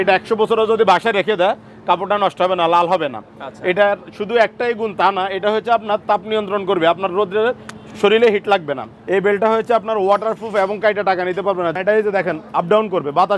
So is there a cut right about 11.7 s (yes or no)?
yes